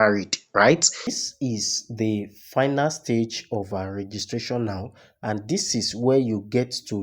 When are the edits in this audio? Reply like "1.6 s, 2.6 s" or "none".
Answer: 1.2 s